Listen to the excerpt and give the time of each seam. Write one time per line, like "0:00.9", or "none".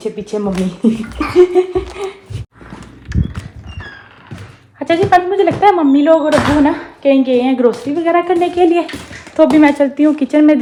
none